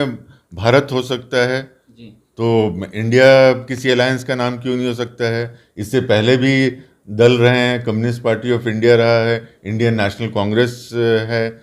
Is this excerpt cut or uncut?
uncut